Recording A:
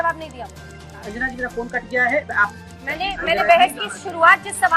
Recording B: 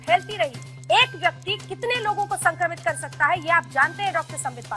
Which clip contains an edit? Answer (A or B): A